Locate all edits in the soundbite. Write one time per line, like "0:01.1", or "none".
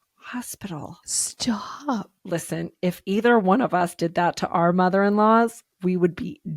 0:02.2